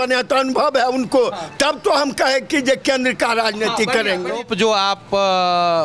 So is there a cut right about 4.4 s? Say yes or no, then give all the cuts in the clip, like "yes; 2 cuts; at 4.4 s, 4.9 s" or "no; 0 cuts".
yes; 1 cut; at 4.4 s